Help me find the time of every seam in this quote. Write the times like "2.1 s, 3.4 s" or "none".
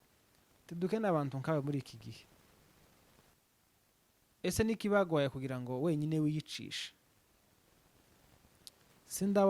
3.3 s